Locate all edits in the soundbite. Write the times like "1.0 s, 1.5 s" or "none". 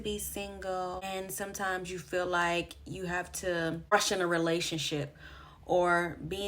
1.0 s, 3.9 s